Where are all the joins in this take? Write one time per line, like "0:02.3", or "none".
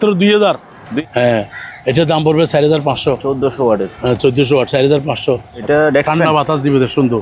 0:01.0
0:05.5